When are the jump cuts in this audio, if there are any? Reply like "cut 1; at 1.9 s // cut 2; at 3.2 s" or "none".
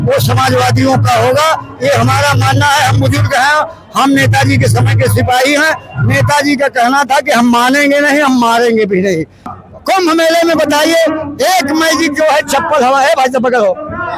cut 1; at 9.5 s